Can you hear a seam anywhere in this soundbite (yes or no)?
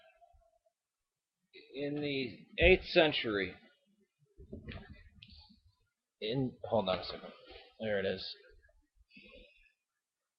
yes